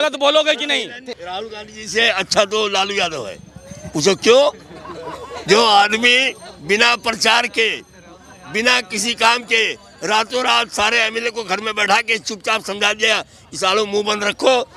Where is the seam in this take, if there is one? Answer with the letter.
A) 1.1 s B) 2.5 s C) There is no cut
A